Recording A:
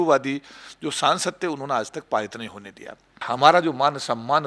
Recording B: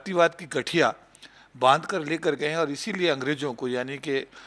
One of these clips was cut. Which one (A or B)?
A